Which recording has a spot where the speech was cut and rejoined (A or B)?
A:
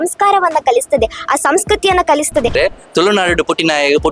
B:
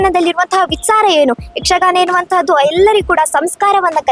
A